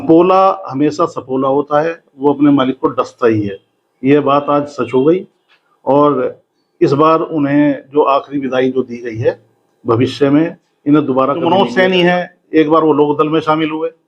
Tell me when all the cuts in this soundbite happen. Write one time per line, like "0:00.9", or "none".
0:11.4